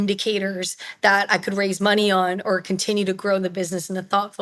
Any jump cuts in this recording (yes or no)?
no